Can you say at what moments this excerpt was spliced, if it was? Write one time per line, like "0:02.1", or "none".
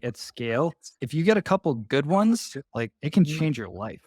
0:01.0